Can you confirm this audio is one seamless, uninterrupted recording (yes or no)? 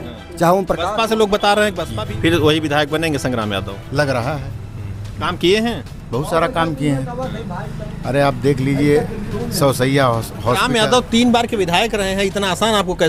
no